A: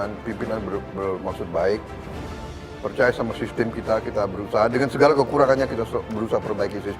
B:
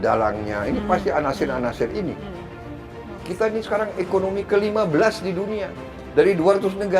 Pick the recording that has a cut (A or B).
B